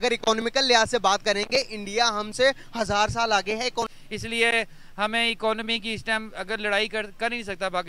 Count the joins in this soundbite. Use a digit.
1